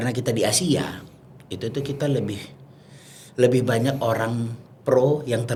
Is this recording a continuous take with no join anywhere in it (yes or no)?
yes